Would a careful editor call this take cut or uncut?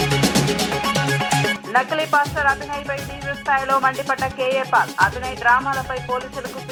uncut